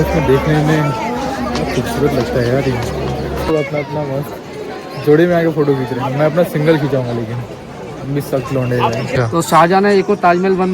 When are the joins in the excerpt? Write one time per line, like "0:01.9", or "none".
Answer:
0:03.5
0:09.1